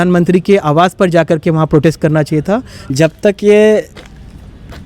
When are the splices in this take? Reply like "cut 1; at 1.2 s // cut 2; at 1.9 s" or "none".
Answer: cut 1; at 2.8 s

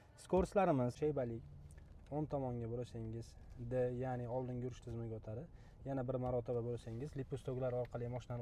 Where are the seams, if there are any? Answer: cut 1; at 0.9 s

